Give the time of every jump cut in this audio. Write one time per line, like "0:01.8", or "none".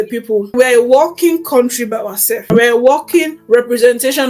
0:02.4
0:03.4